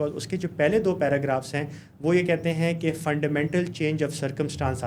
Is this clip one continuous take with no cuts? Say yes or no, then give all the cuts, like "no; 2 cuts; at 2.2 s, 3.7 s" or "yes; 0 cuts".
yes; 0 cuts